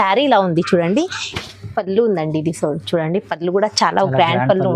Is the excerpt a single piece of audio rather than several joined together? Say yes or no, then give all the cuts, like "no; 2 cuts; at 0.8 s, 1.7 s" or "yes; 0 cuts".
no; 1 cut; at 1.3 s